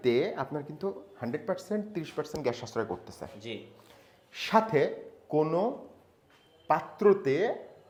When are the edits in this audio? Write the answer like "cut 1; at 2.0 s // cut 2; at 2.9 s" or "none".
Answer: none